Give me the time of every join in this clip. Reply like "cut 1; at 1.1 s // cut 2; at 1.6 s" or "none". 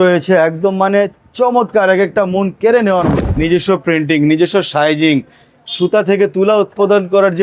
cut 1; at 3.2 s